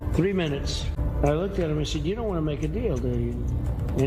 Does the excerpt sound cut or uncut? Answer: cut